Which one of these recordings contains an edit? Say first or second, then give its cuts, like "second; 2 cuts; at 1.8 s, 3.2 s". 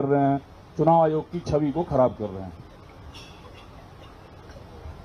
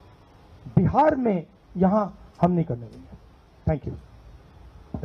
second; 1 cut; at 1.6 s